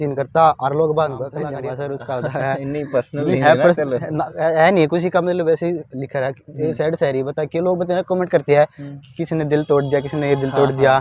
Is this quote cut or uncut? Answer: cut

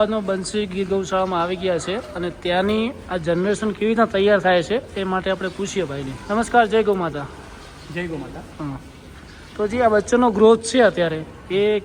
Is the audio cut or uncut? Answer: uncut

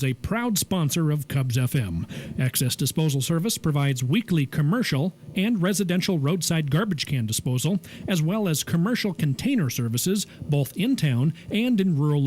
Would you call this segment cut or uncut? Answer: uncut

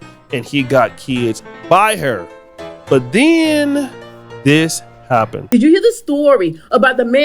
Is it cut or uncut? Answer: cut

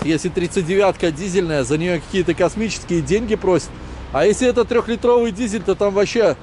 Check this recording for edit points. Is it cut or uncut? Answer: uncut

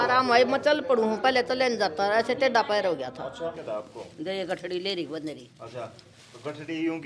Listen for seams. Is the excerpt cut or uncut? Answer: cut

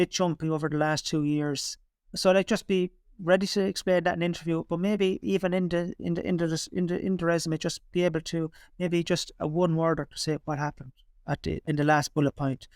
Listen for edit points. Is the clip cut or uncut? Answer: uncut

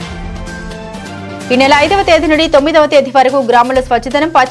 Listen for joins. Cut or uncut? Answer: cut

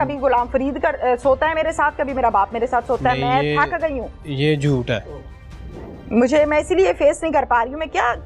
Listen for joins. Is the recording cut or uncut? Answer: uncut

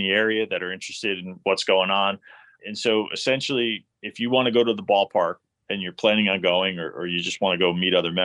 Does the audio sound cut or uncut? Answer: cut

